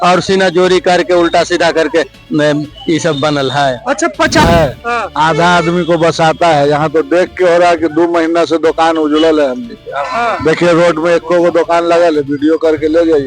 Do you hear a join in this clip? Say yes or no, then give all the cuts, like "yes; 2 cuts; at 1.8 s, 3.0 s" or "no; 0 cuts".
yes; 1 cut; at 4.4 s